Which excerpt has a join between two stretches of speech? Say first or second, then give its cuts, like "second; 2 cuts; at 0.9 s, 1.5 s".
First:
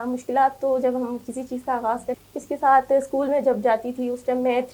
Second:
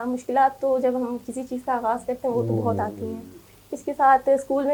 first; 1 cut; at 2.2 s